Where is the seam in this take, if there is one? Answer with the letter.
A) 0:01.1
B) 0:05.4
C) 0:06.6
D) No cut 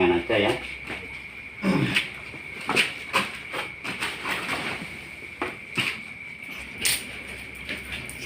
C